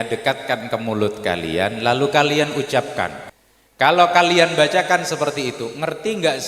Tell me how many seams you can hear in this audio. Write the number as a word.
one